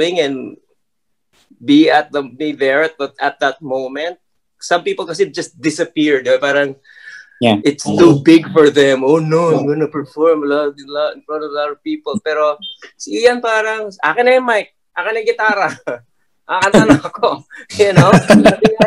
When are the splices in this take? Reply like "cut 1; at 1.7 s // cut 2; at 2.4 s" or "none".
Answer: none